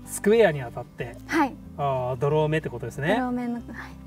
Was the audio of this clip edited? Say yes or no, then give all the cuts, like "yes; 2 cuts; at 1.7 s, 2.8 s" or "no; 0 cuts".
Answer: no; 0 cuts